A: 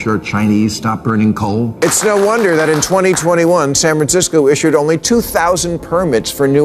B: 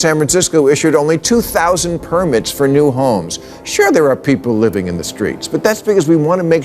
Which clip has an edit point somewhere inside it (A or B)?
A